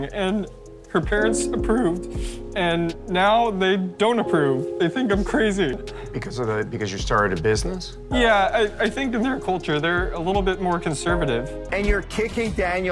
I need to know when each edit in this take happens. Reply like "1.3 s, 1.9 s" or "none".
11.6 s